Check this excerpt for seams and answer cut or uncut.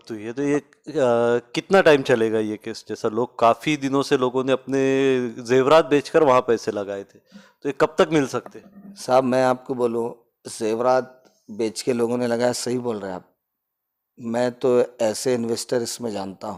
uncut